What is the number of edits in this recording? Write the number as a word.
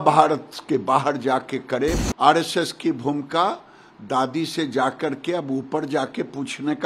one